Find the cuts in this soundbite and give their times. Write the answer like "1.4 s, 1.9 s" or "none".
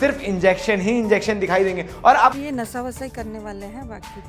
2.4 s